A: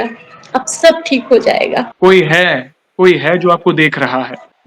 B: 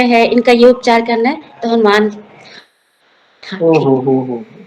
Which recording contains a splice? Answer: A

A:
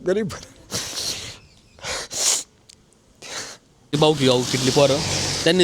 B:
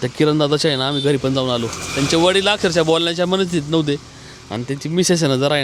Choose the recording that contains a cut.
A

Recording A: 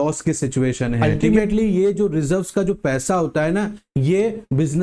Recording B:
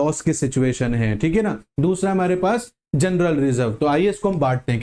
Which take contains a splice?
A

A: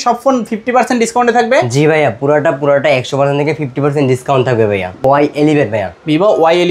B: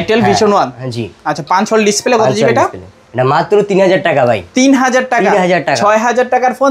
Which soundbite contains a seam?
A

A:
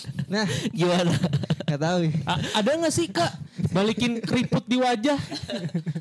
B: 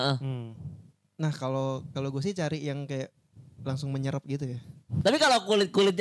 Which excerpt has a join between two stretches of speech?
B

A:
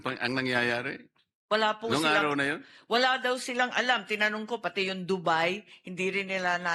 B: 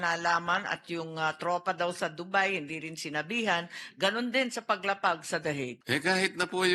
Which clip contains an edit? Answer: B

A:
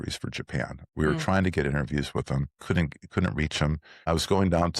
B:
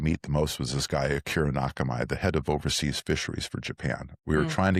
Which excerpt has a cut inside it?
A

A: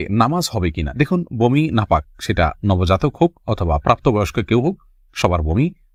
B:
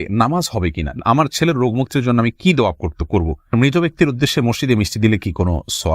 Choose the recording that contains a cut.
B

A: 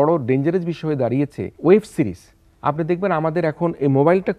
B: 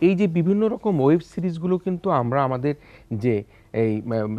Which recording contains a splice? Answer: A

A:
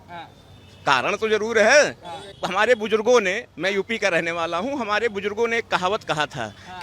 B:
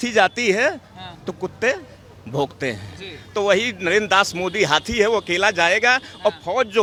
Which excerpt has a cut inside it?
A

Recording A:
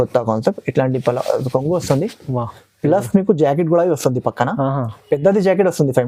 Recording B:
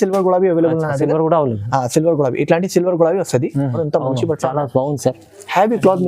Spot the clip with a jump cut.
B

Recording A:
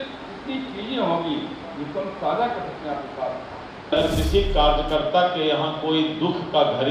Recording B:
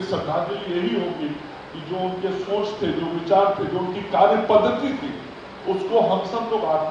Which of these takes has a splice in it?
A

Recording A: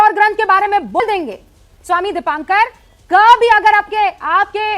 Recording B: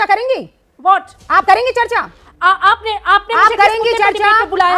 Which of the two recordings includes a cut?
A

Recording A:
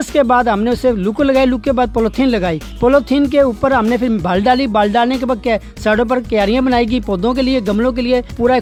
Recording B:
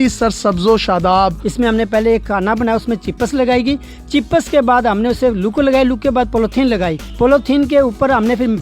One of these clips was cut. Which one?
B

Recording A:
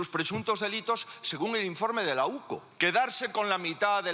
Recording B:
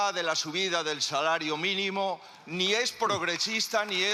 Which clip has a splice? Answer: A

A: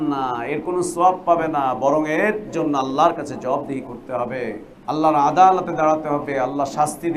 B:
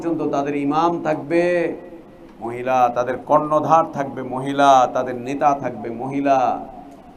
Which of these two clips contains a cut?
A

